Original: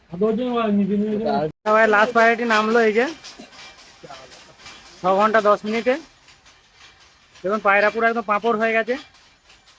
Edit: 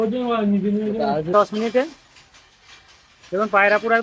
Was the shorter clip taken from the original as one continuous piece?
no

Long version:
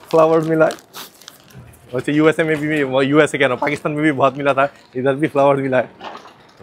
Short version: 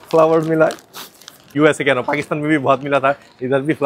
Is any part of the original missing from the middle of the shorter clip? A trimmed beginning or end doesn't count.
yes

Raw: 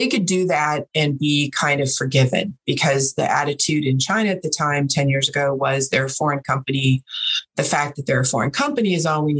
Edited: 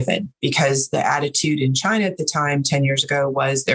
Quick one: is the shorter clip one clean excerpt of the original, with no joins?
yes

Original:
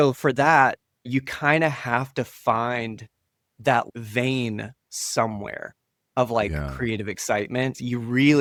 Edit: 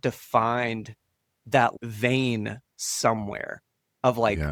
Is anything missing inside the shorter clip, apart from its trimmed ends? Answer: no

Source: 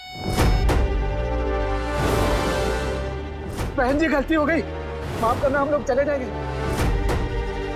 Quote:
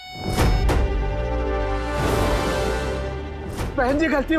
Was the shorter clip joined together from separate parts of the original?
no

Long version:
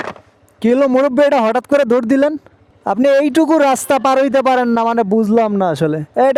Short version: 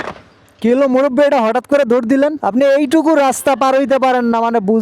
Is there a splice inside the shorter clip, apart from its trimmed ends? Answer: yes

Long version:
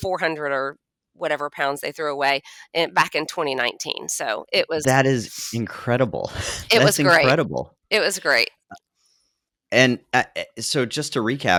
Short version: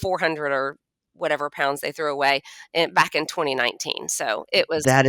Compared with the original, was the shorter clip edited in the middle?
no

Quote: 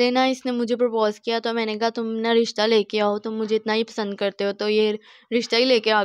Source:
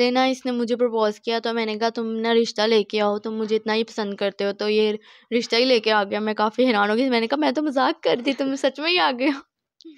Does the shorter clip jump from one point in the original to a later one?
no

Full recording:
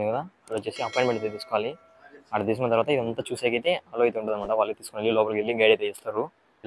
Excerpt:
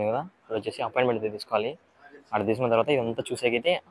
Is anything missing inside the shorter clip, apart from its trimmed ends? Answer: no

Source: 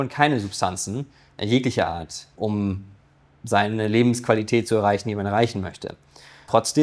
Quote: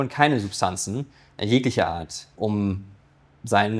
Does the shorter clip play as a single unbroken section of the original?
yes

